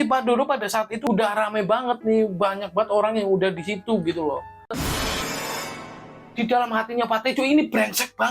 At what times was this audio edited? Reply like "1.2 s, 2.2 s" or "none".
4.7 s